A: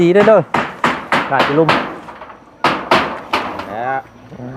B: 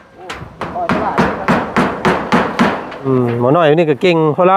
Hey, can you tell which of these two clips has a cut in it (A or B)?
B